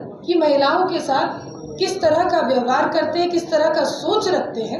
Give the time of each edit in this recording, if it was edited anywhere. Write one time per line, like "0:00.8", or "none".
none